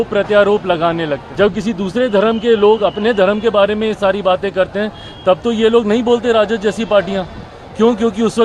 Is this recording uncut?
no; 1 cut; at 1.2 s

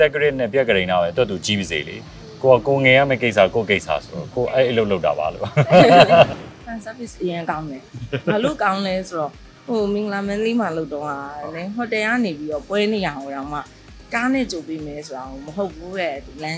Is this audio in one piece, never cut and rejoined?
no; 1 cut; at 6.4 s

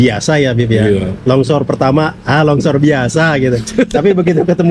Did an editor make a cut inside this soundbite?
no; 0 cuts

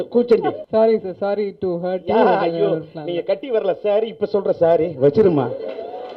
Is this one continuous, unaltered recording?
yes; 0 cuts

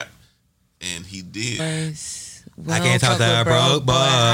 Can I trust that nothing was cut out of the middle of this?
no; 1 cut; at 1.6 s

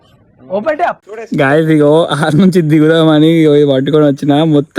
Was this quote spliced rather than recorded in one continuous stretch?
yes; 1 cut; at 1.1 s

